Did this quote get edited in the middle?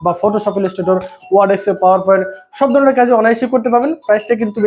no; 0 cuts

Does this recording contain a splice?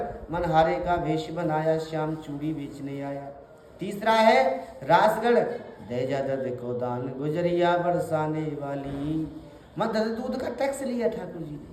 no; 0 cuts

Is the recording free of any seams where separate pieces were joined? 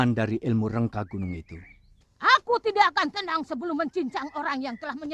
no; 1 cut; at 1.9 s

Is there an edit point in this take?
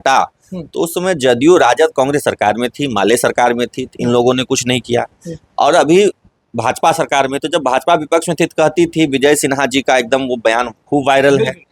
no; 0 cuts

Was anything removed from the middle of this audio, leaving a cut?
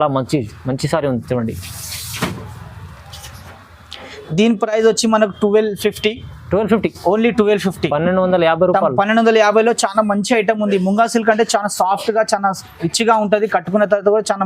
no; 0 cuts

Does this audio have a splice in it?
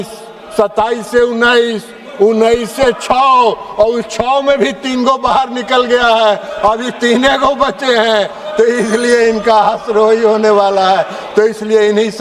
no; 0 cuts

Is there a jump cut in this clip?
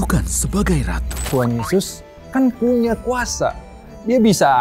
yes; 1 cut; at 1.2 s

